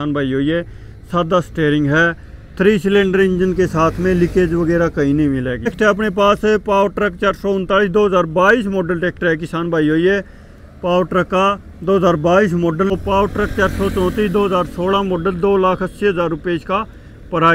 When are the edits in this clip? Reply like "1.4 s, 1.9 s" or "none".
5.7 s, 12.9 s